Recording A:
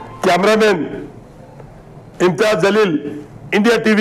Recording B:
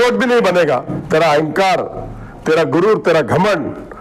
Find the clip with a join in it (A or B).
B